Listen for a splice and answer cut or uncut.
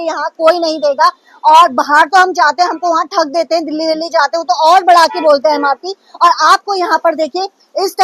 uncut